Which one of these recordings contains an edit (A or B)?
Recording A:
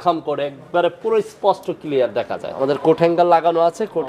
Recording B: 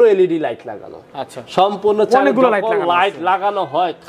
A